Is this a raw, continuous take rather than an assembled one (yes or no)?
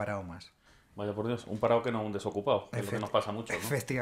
no